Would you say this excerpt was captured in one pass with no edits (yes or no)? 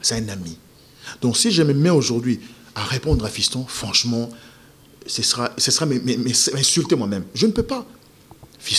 yes